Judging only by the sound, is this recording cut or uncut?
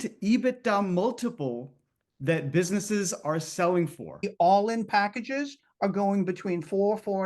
cut